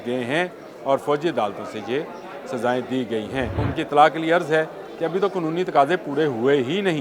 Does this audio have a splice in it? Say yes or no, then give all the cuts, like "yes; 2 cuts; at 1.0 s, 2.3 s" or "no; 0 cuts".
yes; 1 cut; at 3.7 s